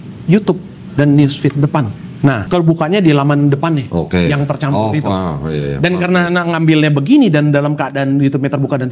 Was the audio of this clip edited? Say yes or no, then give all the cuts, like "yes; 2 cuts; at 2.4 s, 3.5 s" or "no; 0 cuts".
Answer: yes; 1 cut; at 2.4 s